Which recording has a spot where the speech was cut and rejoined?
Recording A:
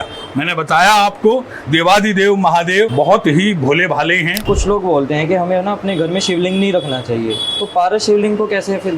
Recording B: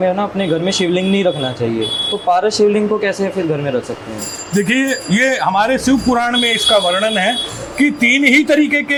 A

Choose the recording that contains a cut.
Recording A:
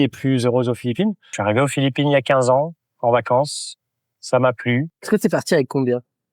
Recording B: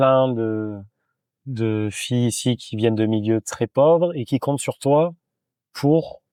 A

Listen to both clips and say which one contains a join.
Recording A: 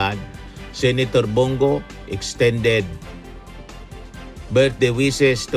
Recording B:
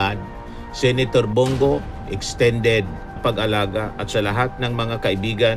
B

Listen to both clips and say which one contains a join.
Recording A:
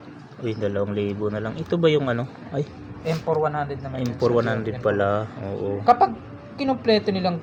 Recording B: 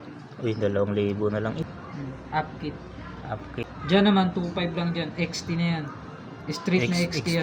B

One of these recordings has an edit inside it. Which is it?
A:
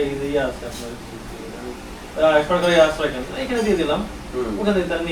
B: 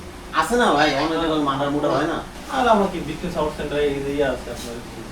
B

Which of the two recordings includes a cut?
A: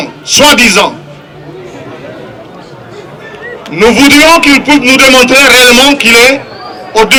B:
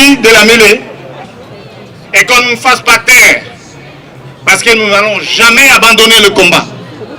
B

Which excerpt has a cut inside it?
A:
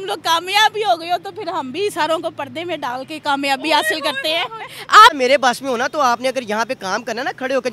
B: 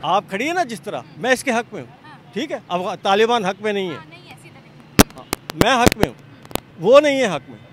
A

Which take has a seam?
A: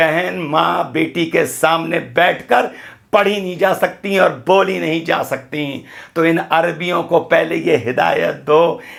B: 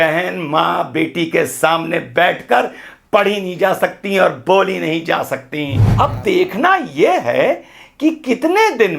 B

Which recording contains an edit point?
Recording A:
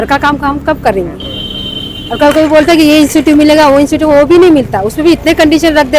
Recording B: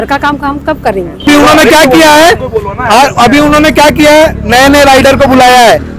B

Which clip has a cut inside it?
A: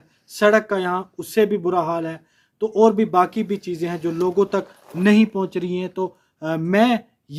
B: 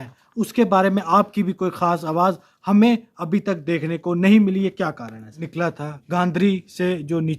B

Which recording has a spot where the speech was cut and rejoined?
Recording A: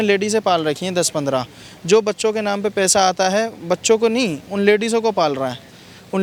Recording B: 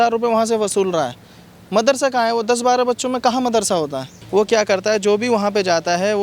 B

